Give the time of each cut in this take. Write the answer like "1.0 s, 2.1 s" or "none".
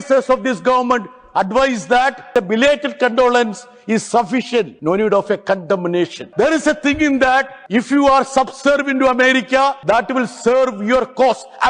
2.3 s, 4.7 s, 6.2 s, 7.6 s, 9.8 s